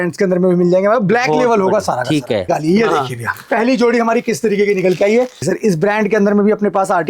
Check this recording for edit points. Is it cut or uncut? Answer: cut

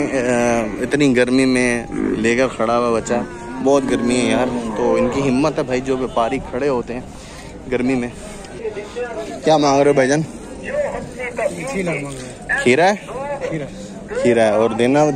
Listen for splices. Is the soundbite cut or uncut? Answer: cut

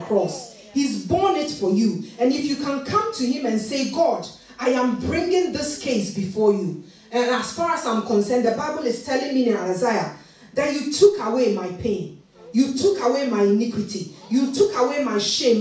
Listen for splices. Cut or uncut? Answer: uncut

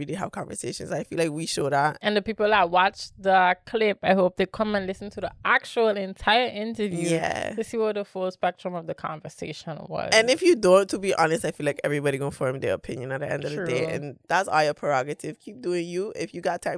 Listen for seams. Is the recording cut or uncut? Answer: cut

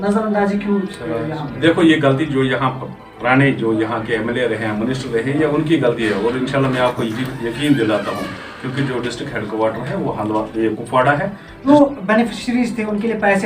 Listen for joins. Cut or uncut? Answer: cut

